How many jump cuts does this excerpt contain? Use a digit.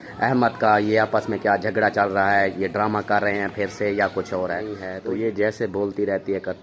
1